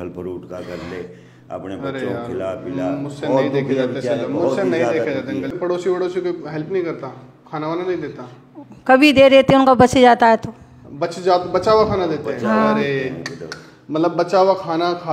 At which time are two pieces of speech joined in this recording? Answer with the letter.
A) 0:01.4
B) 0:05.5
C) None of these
B